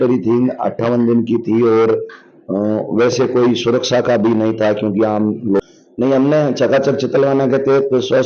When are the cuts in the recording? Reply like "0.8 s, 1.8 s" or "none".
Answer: 5.6 s